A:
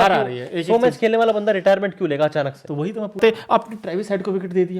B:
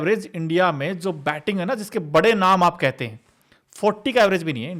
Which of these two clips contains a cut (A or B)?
A